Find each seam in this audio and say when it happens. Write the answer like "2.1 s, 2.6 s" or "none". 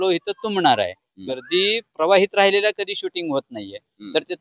1.4 s